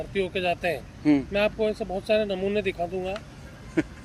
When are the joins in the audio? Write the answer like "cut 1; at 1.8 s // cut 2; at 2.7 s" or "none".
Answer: none

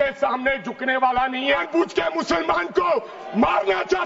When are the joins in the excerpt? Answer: cut 1; at 1.6 s

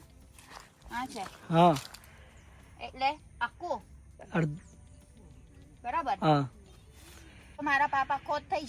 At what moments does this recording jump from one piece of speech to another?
cut 1; at 7.6 s

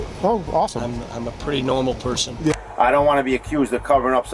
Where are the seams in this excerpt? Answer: cut 1; at 2.5 s

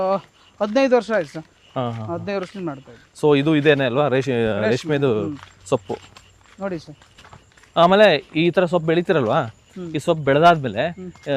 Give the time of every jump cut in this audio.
none

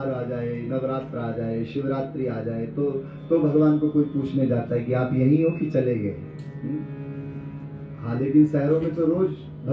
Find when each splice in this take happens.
none

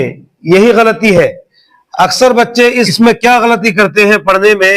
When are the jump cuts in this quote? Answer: cut 1; at 1.8 s // cut 2; at 2.9 s

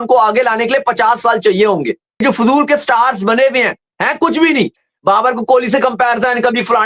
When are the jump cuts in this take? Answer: cut 1; at 2.2 s

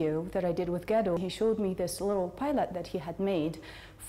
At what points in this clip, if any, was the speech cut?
cut 1; at 1.2 s

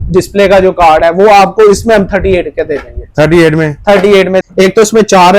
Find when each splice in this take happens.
cut 1; at 4.4 s

